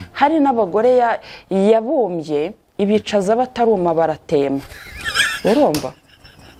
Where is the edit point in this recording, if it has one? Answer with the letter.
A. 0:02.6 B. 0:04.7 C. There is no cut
C